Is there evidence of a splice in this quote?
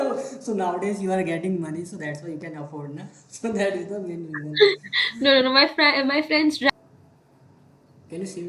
yes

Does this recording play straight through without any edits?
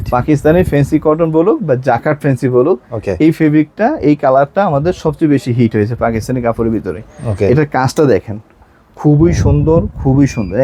yes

